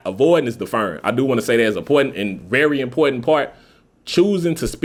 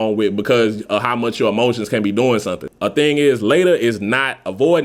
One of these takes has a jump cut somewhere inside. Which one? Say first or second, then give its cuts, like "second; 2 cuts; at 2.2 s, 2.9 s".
second; 1 cut; at 2.6 s